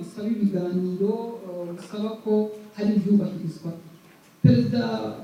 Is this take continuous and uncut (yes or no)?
yes